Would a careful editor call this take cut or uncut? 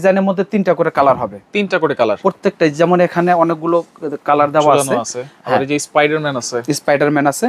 uncut